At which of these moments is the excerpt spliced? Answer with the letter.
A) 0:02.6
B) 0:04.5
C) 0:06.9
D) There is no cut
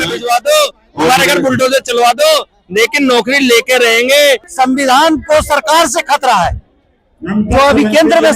B